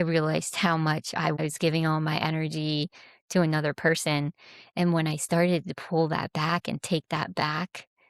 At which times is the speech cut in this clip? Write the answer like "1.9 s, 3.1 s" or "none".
1.4 s